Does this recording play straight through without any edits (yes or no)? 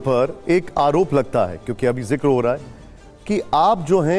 yes